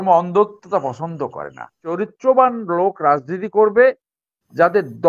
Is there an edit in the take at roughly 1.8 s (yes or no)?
yes